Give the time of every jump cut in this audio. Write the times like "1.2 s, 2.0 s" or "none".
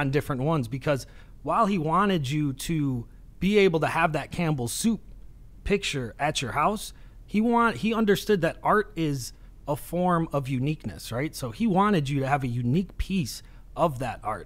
none